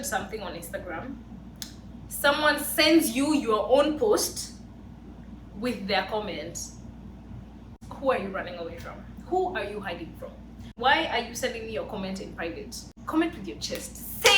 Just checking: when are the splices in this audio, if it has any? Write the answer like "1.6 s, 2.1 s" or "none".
7.8 s, 10.7 s, 12.9 s